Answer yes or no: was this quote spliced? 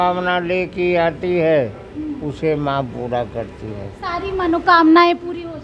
no